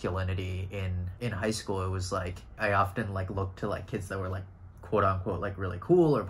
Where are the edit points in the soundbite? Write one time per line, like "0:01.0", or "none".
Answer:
0:01.0
0:02.5